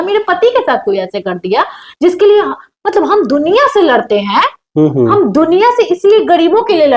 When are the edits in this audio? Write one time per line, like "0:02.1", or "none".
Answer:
none

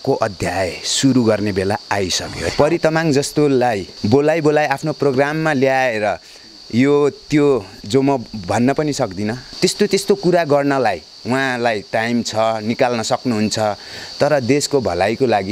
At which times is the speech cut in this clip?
0:02.3
0:03.9
0:09.4

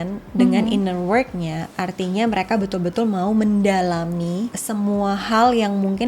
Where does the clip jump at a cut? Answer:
0:04.6

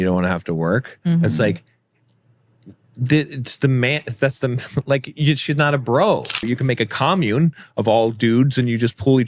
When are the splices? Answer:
0:06.4

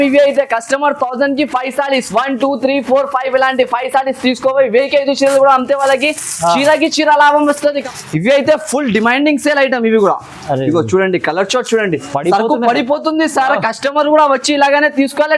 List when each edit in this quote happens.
0:07.8

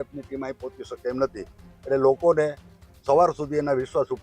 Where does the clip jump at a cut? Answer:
none

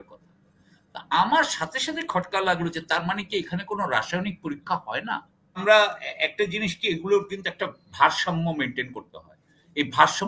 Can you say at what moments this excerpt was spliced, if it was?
0:05.6

